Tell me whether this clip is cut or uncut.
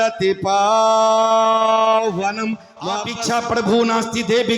cut